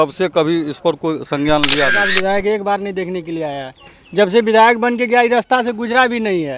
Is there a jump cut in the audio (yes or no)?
yes